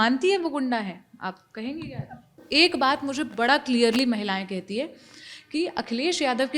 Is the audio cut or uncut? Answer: cut